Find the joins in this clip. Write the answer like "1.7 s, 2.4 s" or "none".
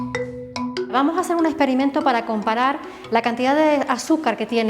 0.9 s